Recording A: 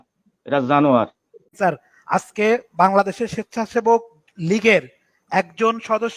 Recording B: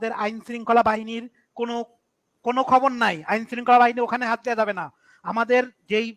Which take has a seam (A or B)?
A